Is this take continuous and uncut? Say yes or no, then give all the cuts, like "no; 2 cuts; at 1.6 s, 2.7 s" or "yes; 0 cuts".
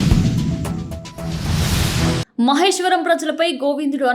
no; 1 cut; at 2.3 s